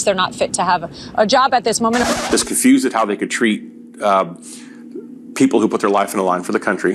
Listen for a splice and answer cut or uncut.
cut